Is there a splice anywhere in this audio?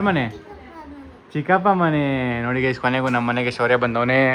no; 0 cuts

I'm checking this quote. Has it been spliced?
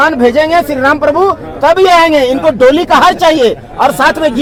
no; 0 cuts

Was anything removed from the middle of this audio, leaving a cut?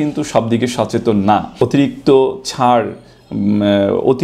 yes; 1 cut; at 1.5 s

